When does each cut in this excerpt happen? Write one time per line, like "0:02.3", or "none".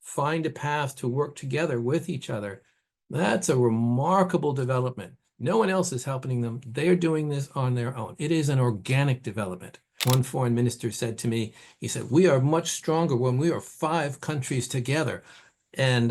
0:09.9

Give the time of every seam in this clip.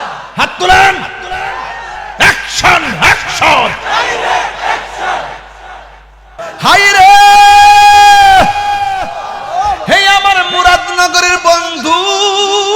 0:06.4

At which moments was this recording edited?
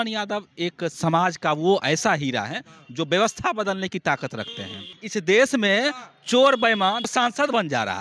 0:01.0
0:05.0
0:07.0

